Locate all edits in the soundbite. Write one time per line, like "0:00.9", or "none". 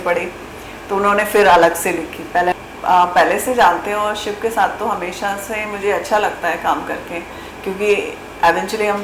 0:02.5